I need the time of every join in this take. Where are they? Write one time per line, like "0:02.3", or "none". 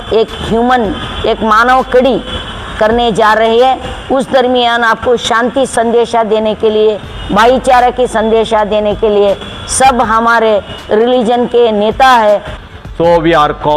0:12.5